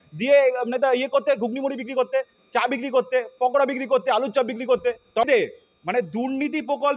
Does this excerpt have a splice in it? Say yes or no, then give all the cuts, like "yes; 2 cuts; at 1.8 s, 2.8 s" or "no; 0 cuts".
yes; 1 cut; at 5.3 s